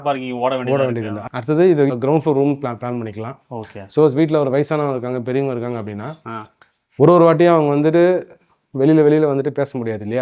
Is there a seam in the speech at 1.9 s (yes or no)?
yes